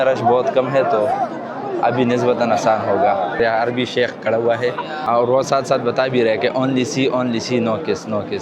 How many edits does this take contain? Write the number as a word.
one